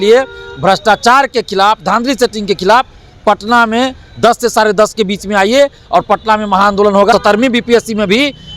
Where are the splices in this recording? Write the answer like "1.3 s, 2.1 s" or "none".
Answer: 7.1 s